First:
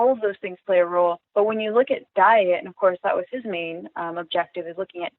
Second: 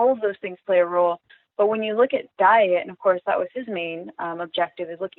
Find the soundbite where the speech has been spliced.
first; 1 cut; at 1.2 s

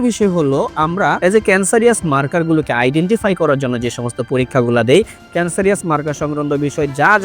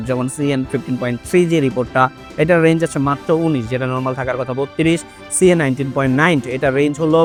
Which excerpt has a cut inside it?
first; 1 cut; at 1.2 s

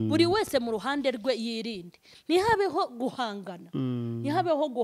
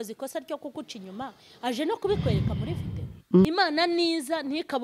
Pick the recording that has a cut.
second; 1 cut; at 3.4 s

